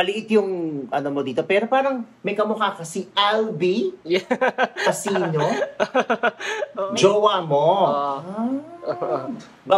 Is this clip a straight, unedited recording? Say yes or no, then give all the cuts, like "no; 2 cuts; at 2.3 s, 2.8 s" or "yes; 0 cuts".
no; 1 cut; at 6.7 s